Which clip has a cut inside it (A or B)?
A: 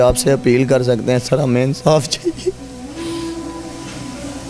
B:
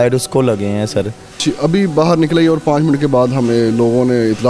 B